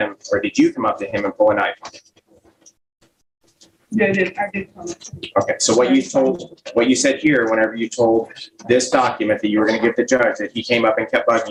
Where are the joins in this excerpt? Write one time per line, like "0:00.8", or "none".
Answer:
none